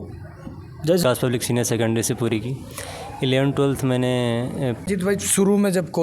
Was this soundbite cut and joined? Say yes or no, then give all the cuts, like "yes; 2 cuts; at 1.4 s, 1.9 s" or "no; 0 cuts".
yes; 2 cuts; at 1.0 s, 4.8 s